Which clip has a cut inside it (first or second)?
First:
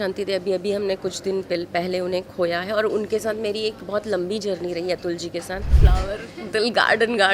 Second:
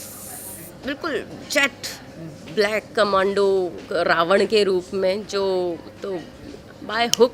first